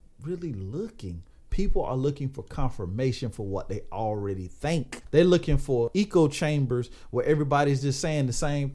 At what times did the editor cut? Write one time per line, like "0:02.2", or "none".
0:05.0
0:05.9